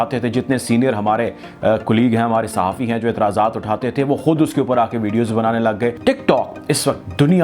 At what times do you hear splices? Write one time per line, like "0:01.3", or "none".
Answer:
0:06.0